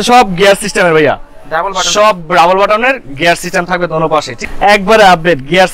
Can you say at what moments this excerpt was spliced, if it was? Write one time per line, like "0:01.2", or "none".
0:04.3